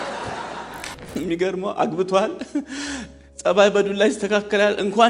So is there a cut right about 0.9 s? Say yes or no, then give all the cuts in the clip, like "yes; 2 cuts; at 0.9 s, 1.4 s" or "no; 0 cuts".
yes; 1 cut; at 0.9 s